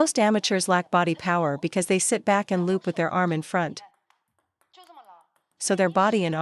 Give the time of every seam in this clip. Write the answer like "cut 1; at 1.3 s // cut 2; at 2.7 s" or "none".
cut 1; at 3.8 s